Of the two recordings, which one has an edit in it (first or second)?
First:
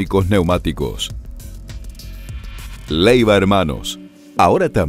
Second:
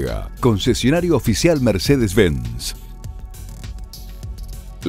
first